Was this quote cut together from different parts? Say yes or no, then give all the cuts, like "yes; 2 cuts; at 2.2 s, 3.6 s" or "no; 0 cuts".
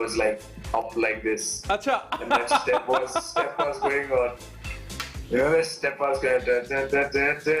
no; 0 cuts